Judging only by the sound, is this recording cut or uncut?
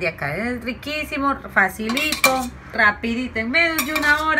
cut